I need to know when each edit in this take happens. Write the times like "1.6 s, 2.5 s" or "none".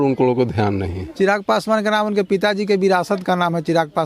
1.0 s